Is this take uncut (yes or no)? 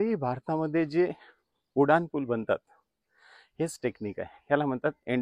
yes